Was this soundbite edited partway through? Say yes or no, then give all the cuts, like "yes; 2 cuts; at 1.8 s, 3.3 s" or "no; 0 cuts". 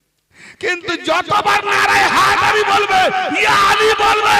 no; 0 cuts